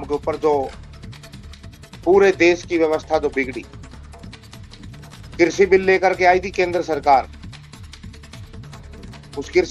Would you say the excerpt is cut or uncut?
uncut